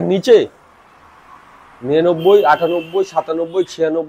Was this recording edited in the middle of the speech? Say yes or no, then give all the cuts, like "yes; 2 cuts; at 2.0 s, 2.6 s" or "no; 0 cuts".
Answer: no; 0 cuts